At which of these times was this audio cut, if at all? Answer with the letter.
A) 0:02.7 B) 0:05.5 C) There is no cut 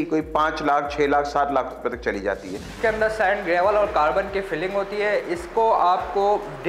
A